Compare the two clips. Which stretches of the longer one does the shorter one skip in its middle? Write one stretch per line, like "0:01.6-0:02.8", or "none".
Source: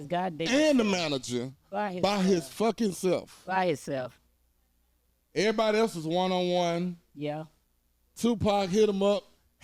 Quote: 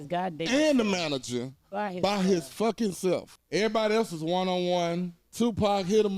0:03.3-0:05.2
0:07.0-0:08.0